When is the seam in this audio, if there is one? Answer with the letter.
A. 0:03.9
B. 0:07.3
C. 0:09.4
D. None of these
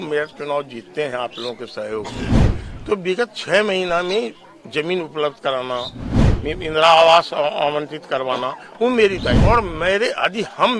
C